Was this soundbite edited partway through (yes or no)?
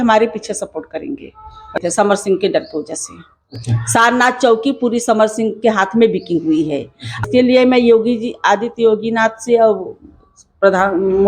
yes